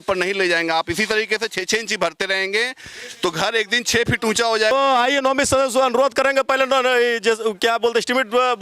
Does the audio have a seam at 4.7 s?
yes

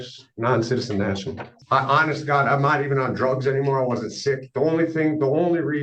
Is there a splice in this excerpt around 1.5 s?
yes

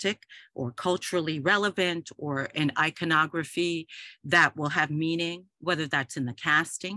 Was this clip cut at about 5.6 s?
no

